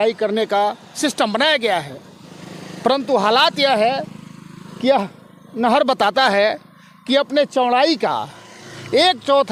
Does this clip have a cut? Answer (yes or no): no